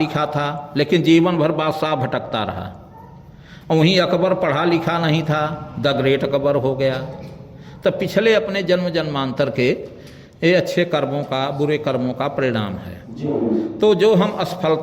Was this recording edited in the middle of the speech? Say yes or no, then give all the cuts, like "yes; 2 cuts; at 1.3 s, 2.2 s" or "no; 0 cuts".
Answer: no; 0 cuts